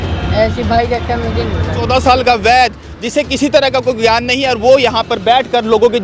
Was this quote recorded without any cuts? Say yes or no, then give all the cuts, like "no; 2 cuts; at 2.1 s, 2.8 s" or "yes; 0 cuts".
no; 1 cut; at 1.8 s